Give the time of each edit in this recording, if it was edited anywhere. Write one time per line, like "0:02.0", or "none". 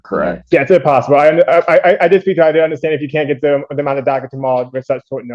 none